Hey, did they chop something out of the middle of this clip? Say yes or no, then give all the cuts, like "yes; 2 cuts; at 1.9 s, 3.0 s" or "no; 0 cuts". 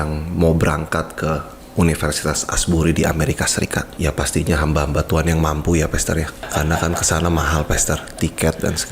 yes; 2 cuts; at 3.9 s, 6.4 s